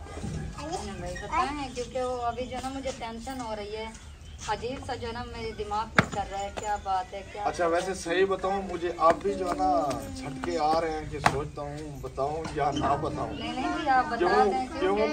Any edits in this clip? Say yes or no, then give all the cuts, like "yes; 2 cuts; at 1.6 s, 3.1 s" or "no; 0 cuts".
no; 0 cuts